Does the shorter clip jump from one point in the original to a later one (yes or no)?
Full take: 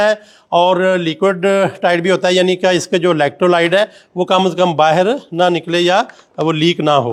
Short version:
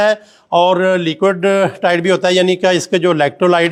no